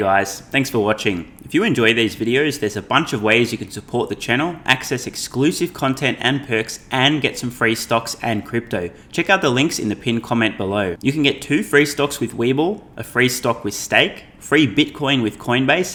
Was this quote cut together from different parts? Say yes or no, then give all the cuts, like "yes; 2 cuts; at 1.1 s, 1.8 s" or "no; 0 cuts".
no; 0 cuts